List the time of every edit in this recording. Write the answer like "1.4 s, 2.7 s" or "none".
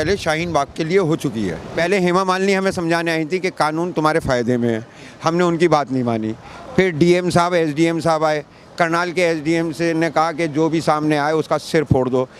1.6 s